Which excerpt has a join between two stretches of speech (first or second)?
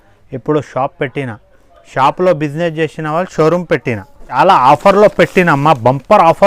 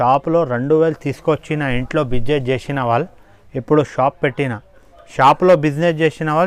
first